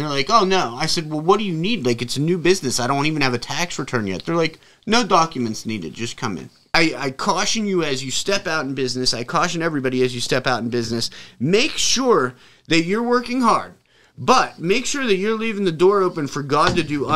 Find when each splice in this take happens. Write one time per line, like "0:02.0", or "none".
0:06.5